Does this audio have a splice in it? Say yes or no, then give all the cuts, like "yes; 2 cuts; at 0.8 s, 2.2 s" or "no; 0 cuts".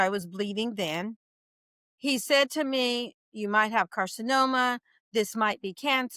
no; 0 cuts